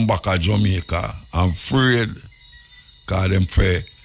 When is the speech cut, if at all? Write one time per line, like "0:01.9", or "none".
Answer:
none